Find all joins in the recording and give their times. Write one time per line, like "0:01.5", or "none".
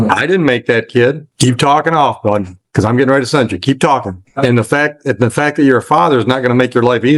0:01.3
0:04.2